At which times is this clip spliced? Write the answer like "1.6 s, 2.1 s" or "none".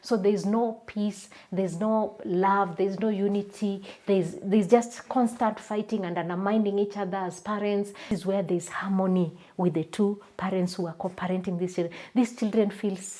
8.1 s